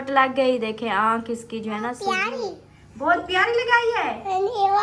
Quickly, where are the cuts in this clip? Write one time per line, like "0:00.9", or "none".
0:02.2